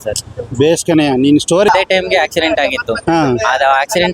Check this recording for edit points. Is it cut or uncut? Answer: cut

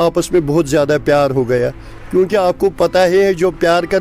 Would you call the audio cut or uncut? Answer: uncut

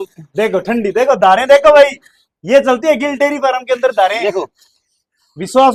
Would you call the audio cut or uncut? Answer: uncut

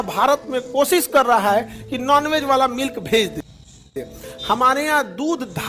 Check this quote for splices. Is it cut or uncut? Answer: cut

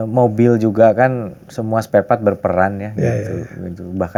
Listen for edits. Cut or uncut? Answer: uncut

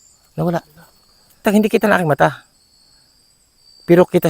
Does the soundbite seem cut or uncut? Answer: cut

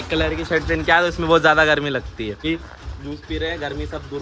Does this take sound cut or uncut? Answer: cut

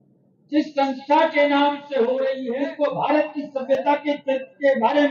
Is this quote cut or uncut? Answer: cut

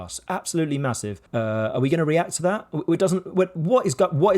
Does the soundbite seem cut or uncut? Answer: cut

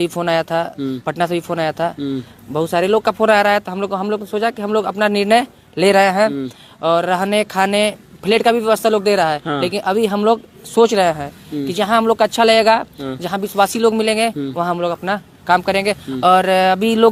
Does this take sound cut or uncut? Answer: uncut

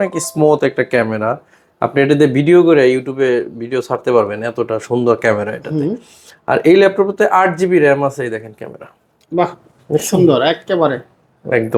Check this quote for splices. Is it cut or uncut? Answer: uncut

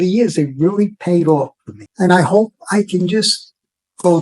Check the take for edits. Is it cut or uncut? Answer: cut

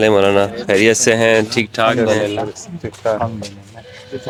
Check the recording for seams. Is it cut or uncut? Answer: uncut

